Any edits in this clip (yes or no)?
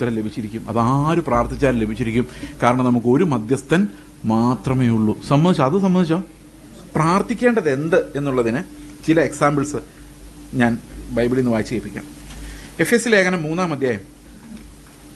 yes